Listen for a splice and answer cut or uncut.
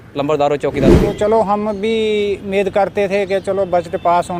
cut